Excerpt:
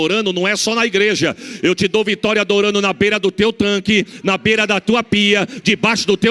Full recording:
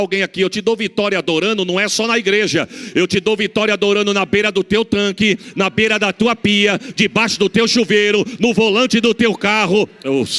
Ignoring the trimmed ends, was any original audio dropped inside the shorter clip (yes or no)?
no